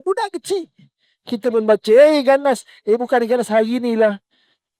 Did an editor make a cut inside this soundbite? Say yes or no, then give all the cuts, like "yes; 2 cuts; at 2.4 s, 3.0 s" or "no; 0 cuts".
no; 0 cuts